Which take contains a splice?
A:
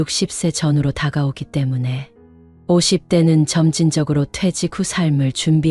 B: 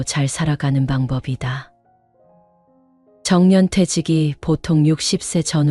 B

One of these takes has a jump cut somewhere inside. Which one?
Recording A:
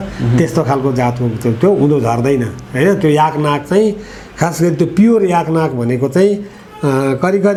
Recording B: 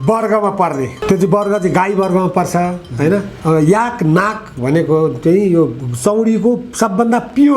B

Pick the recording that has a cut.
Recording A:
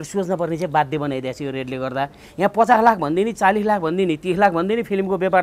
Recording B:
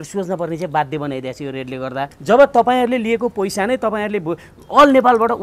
B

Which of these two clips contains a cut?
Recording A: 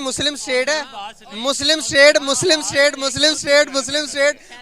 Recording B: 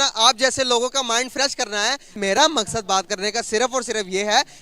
B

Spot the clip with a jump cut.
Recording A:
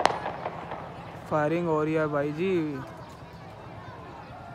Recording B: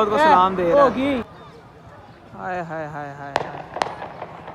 B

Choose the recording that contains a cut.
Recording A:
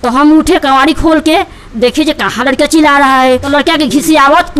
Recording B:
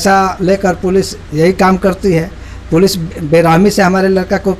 A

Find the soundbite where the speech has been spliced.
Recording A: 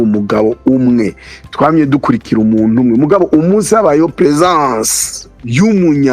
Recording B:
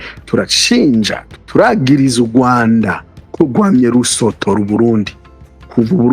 B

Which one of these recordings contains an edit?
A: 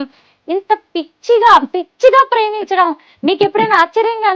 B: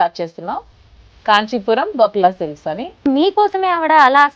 B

